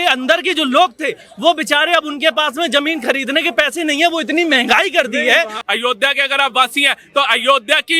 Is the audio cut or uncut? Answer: cut